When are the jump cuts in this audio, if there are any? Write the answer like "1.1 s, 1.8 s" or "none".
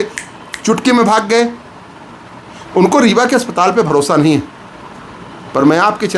none

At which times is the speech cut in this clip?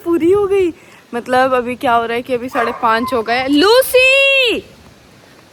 none

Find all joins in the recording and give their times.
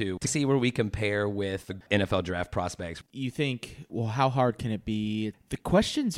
1.8 s, 3.0 s, 3.9 s, 5.3 s

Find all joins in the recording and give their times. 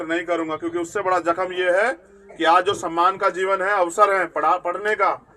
none

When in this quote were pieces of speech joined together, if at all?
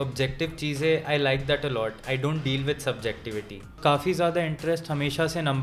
3.8 s

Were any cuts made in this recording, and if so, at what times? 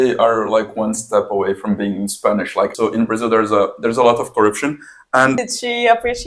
2.7 s, 5.4 s

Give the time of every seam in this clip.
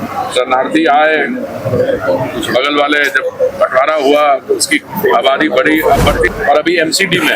6.3 s

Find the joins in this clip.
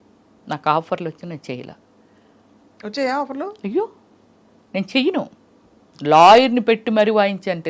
none

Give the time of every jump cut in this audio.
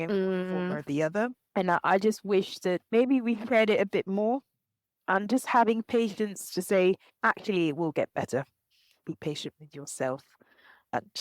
1.4 s, 9.0 s

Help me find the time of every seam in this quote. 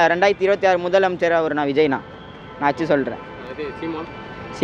none

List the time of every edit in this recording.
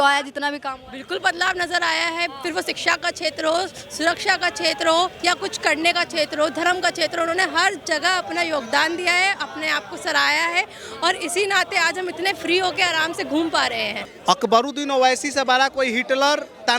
14.0 s

